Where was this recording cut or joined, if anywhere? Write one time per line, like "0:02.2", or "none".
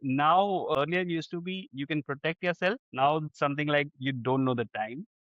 0:00.8
0:02.9